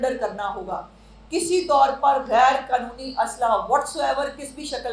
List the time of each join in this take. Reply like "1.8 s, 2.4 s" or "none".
none